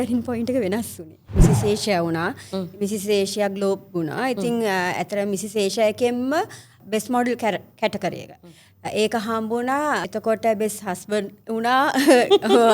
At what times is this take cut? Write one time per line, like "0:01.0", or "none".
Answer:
0:01.4
0:06.8
0:10.0